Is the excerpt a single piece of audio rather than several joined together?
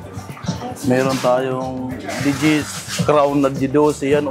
no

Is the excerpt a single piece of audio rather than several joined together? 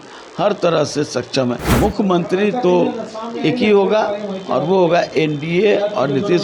no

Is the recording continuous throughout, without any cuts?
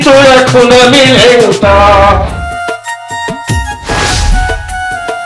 no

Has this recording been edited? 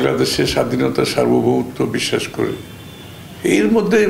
no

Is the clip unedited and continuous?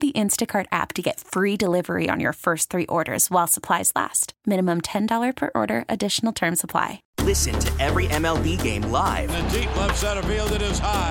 no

